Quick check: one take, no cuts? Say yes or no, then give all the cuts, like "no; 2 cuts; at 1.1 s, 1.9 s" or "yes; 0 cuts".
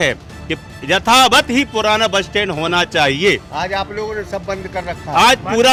yes; 0 cuts